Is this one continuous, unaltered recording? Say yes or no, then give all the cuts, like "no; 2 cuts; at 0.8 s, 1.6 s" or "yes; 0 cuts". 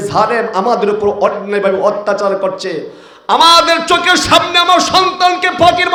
yes; 0 cuts